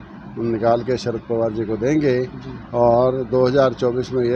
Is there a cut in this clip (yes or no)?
no